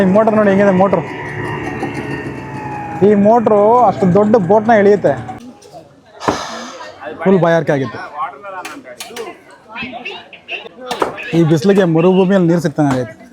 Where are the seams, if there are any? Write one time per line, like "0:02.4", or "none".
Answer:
0:05.3
0:10.7